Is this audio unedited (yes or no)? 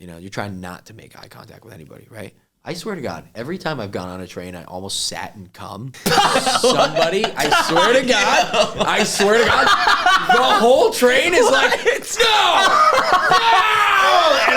no